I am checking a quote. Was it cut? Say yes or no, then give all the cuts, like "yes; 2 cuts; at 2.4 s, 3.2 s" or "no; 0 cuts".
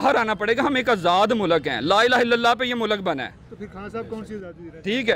no; 0 cuts